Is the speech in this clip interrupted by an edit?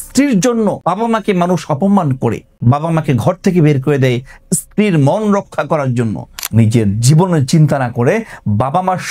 yes; 3 cuts; at 0.8 s, 2.5 s, 6.3 s

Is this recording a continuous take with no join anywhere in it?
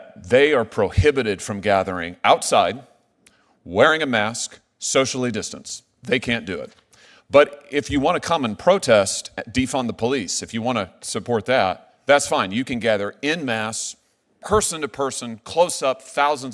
yes; 0 cuts

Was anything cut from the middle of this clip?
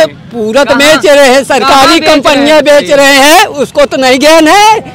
no; 0 cuts

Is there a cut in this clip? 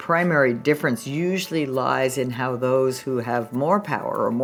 no; 0 cuts

